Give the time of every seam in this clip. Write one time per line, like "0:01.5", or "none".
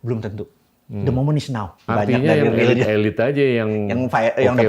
0:01.9

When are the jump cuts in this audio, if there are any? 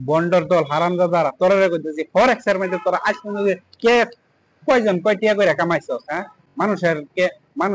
none

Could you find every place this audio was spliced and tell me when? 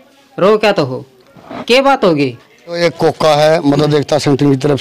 0:02.8

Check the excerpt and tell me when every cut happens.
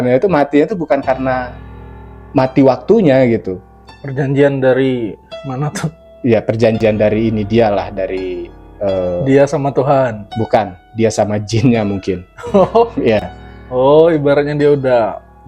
none

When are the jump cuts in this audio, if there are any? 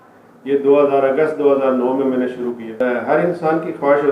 0:02.7

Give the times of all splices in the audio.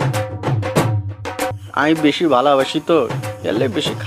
0:01.6

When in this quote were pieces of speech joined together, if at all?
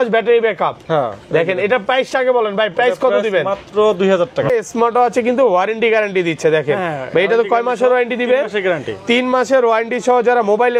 0:04.5

